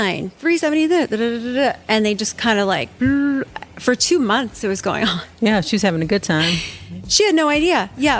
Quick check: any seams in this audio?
no; 0 cuts

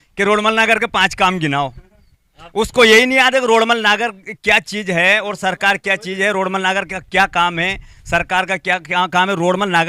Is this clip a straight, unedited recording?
yes; 0 cuts

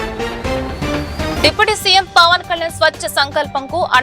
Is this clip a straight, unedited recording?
no; 1 cut; at 1.3 s

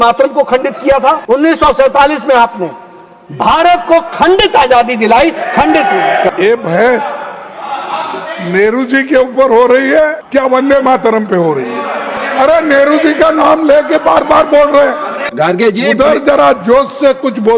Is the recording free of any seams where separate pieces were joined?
no; 5 cuts; at 1.2 s, 6.3 s, 10.2 s, 12.2 s, 15.2 s

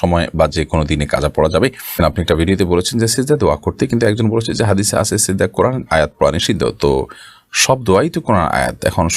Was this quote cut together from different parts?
yes; 1 cut; at 2.0 s

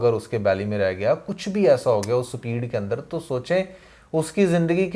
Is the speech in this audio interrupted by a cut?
no; 0 cuts

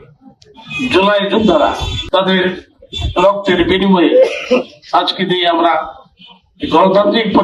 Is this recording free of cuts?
no; 1 cut; at 1.9 s

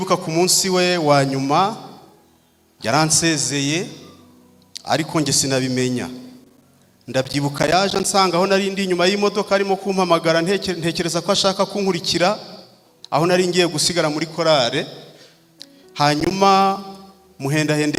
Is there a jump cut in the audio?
no; 0 cuts

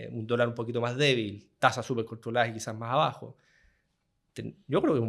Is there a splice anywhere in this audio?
no; 0 cuts

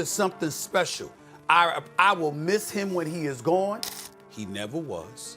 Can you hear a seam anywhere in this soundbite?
yes; 1 cut; at 3.9 s

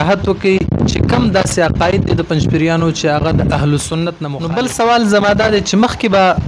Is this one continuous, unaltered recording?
no; 1 cut; at 4.3 s

